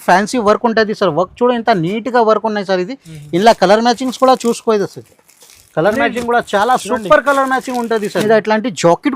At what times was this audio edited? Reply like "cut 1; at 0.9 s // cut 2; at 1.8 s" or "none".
cut 1; at 8.2 s